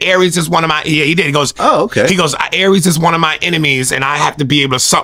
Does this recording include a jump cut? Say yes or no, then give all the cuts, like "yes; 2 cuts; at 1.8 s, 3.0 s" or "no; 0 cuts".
no; 0 cuts